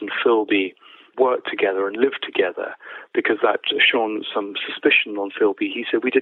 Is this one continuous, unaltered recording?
no; 1 cut; at 1.0 s

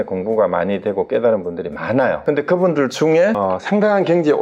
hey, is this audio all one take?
no; 2 cuts; at 2.2 s, 3.4 s

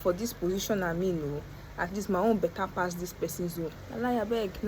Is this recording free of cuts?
no; 1 cut; at 3.7 s

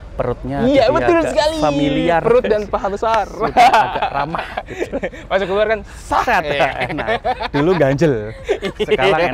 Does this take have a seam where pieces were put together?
no; 0 cuts

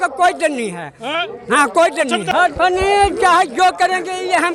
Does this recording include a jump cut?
no; 0 cuts

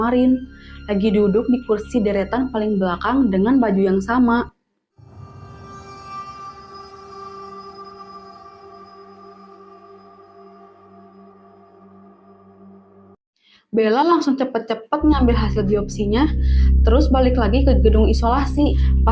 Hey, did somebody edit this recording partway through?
no; 0 cuts

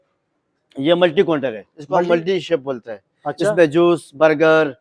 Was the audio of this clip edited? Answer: no; 0 cuts

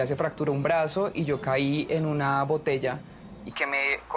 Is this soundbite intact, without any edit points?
yes; 0 cuts

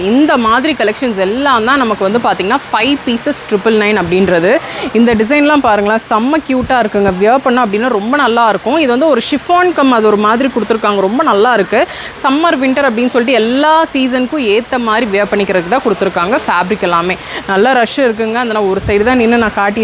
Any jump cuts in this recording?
no; 0 cuts

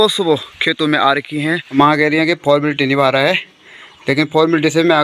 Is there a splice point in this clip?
yes; 1 cut; at 1.8 s

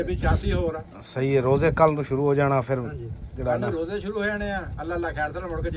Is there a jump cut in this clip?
no; 0 cuts

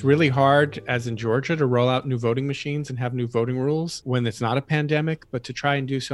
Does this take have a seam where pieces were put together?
yes; 1 cut; at 4.0 s

